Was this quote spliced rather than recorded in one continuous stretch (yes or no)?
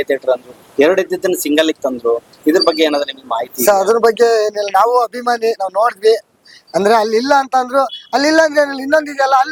no